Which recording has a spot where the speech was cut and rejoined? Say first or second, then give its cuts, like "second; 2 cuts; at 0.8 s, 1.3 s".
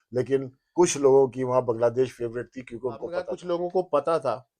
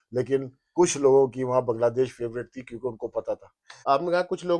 first; 1 cut; at 3.3 s